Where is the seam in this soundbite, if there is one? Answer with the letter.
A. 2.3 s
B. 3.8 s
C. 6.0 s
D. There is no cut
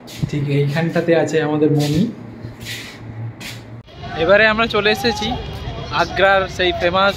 B